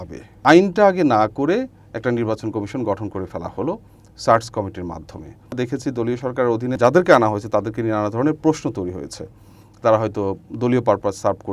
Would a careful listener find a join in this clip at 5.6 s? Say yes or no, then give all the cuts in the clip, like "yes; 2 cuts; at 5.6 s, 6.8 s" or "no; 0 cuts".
yes; 2 cuts; at 5.6 s, 6.8 s